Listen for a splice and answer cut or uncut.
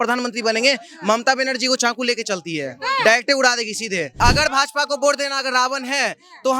cut